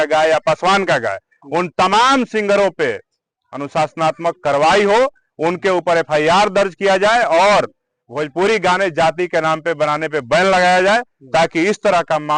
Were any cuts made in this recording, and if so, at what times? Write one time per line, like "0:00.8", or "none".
none